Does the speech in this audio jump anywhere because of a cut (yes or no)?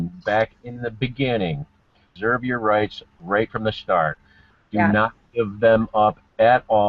yes